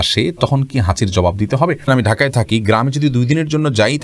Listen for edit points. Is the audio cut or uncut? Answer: cut